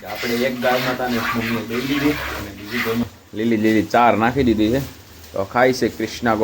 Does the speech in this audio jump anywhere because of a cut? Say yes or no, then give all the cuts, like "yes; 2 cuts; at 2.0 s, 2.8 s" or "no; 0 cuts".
yes; 1 cut; at 3.0 s